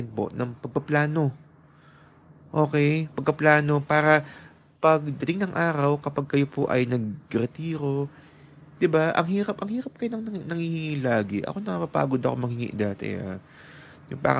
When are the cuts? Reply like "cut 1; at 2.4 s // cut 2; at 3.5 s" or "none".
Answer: none